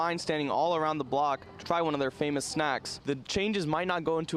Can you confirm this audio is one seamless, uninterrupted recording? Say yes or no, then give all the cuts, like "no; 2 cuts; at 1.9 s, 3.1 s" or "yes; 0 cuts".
no; 1 cut; at 2.9 s